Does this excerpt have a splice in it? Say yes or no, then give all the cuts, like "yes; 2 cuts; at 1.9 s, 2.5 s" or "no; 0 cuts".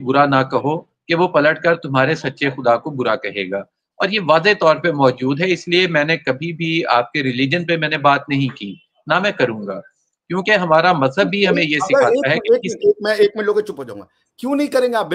no; 0 cuts